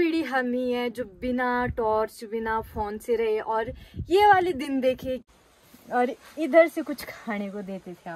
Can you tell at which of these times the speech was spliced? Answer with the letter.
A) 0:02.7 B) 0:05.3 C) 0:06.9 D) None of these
B